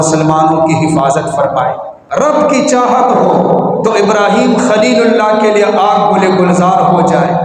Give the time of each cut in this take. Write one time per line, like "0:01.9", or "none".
0:01.9